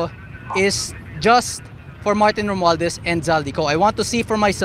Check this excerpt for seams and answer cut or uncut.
uncut